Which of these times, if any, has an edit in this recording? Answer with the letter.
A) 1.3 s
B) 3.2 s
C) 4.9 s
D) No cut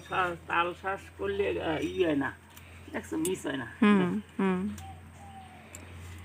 D